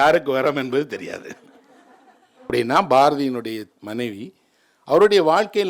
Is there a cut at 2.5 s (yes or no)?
yes